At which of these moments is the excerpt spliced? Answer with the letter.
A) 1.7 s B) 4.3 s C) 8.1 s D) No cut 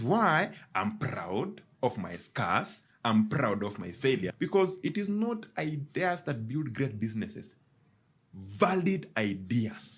B